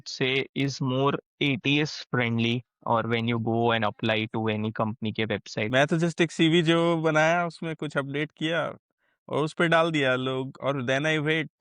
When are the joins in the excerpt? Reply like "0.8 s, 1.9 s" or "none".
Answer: 5.6 s